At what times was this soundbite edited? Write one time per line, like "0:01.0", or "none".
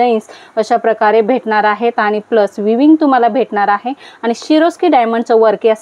none